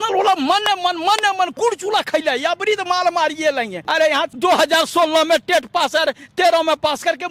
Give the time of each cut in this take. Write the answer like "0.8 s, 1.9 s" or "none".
1.5 s, 4.1 s